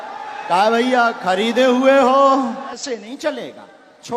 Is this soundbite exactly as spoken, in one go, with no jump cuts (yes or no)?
no